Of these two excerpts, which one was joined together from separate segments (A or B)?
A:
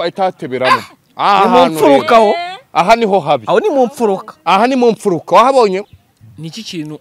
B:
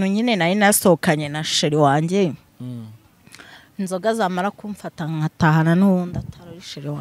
A